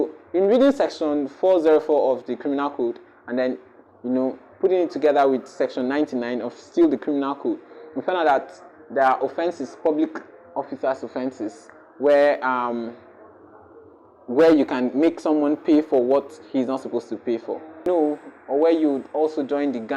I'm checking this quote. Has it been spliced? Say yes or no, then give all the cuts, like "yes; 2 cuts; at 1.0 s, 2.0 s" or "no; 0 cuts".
yes; 1 cut; at 17.9 s